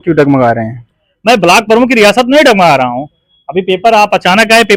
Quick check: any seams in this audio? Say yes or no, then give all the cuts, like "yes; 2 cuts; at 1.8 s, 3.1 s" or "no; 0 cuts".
no; 0 cuts